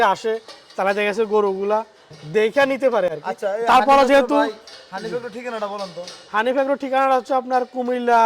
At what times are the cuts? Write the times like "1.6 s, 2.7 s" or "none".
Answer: none